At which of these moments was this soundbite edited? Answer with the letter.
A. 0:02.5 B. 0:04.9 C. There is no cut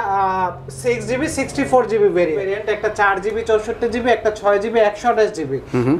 A